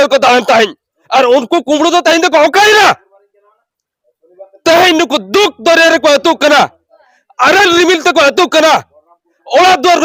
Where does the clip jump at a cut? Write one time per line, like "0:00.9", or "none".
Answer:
none